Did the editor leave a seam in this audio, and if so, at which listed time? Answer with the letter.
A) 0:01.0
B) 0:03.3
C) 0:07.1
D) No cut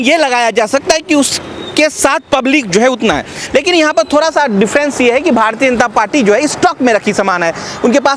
D